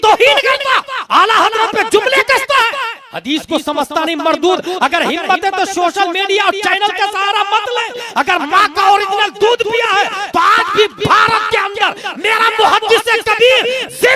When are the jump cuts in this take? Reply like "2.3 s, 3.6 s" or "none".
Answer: none